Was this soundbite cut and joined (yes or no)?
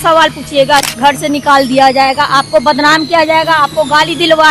yes